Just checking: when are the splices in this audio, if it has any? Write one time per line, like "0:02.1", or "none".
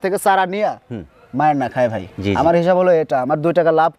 none

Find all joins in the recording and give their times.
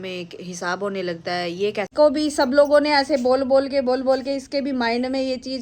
0:01.9

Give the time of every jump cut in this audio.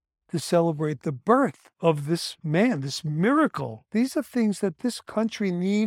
0:01.9
0:03.8

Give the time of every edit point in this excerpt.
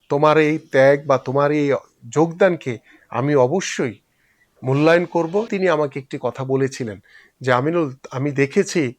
0:05.5

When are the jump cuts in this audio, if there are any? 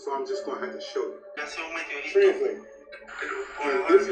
0:01.4

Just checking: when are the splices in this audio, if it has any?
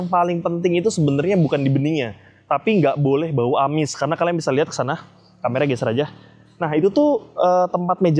none

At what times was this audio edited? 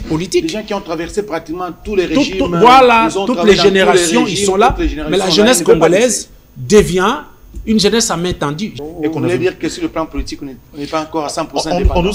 0:08.7

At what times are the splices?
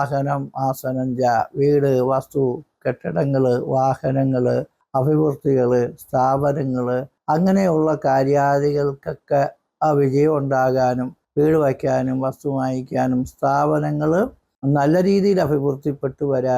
0:04.8
0:07.1
0:11.2
0:14.5

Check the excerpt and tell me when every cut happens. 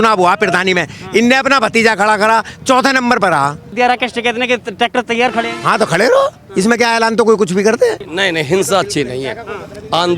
0:03.7
0:08.0

